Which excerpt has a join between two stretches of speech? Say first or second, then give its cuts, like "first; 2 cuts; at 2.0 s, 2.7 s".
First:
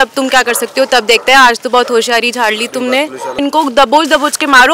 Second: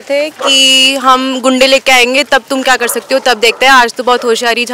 first; 1 cut; at 3.4 s